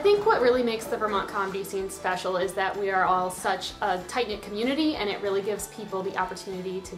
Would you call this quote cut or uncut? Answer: uncut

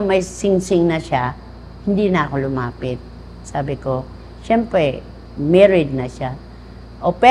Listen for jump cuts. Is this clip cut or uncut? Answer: uncut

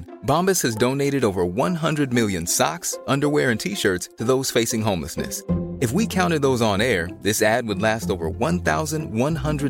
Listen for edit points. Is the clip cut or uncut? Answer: uncut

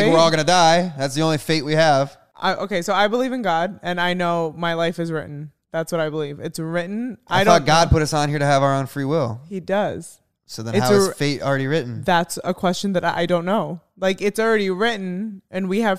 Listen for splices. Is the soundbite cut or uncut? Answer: cut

